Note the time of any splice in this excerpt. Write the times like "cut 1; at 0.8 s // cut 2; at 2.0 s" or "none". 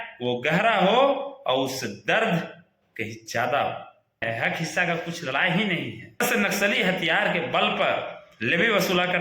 cut 1; at 4.2 s // cut 2; at 6.2 s